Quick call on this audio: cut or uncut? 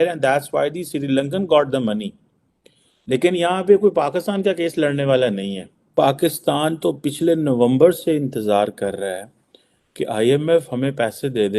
cut